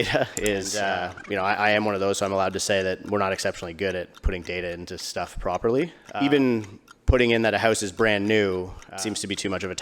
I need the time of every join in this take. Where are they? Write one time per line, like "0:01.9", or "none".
0:01.2

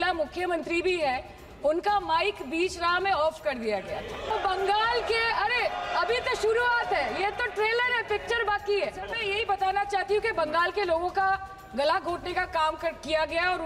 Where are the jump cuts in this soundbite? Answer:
0:04.3
0:09.2

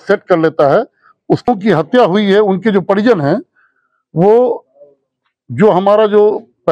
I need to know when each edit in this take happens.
0:01.5

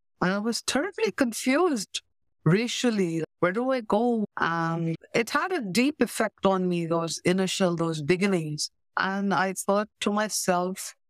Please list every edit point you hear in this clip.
0:04.2

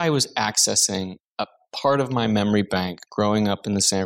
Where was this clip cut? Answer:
0:01.2

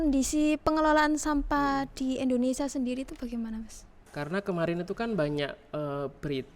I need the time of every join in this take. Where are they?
0:04.0

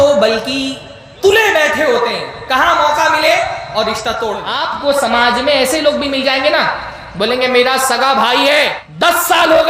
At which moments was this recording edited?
0:04.5
0:08.8

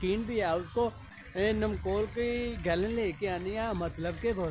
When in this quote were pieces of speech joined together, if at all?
0:01.1

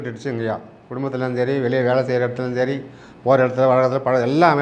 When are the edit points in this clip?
none

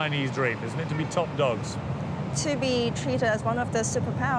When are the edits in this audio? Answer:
none

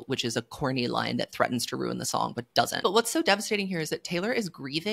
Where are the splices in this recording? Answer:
0:02.7

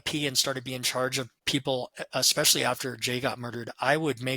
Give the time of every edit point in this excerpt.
0:01.4

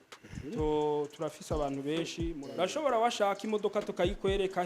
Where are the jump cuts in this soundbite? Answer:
0:02.4

